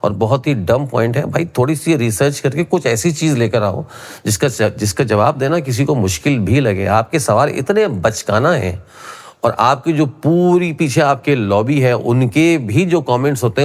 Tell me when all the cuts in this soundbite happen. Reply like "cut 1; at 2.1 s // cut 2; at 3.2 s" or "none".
none